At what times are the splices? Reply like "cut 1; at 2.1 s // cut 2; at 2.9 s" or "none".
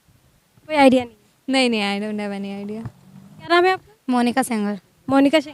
cut 1; at 3.5 s